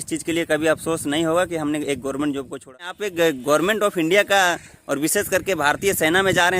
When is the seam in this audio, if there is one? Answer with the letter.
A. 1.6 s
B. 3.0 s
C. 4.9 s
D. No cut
B